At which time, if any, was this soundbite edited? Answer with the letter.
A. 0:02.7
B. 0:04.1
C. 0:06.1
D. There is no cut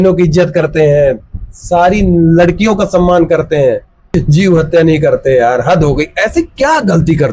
B